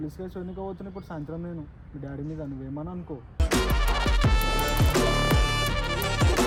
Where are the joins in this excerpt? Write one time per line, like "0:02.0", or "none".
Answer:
none